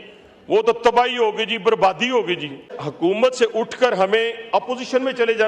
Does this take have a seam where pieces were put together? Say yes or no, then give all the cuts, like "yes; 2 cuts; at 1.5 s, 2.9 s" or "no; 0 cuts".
yes; 1 cut; at 2.7 s